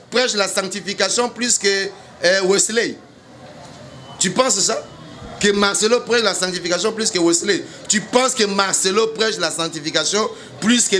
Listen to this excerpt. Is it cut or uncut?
uncut